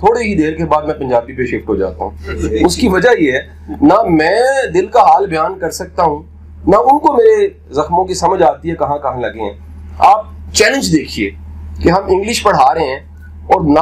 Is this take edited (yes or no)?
no